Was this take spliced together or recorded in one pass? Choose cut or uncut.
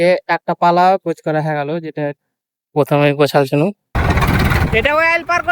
cut